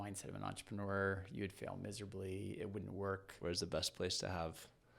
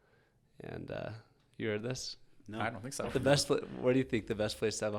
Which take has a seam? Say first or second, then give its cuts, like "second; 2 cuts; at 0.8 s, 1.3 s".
first; 1 cut; at 3.3 s